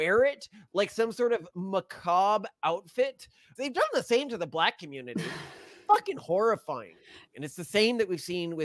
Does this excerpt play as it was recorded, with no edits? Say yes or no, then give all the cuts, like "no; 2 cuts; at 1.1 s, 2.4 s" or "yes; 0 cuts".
no; 2 cuts; at 3.4 s, 7.1 s